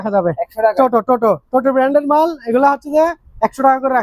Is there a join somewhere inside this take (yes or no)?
no